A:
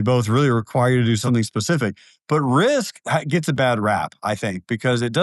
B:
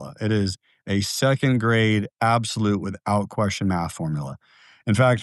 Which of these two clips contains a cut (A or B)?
A